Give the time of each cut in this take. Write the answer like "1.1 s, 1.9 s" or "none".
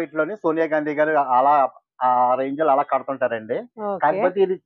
none

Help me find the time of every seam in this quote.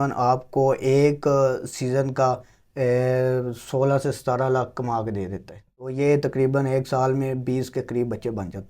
5.6 s

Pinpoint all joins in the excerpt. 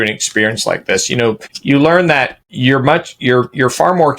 1.5 s, 2.4 s

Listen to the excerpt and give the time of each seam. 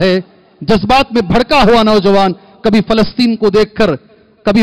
none

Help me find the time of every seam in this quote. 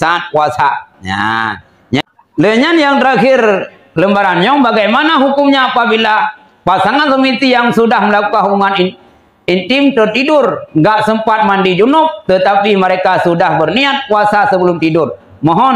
2.0 s

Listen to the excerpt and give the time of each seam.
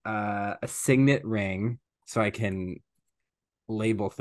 1.9 s

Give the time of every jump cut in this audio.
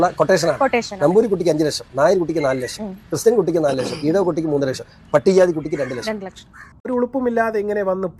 none

